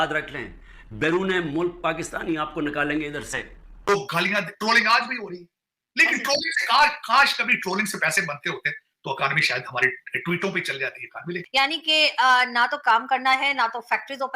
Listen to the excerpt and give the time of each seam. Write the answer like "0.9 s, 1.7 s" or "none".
3.9 s, 11.5 s